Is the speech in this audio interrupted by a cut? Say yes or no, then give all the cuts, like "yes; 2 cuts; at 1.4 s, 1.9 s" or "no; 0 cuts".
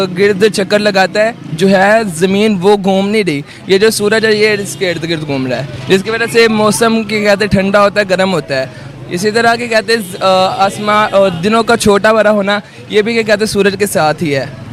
no; 0 cuts